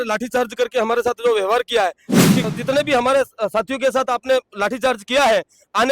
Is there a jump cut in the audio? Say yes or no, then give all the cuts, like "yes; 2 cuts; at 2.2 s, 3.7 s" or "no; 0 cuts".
yes; 1 cut; at 2.5 s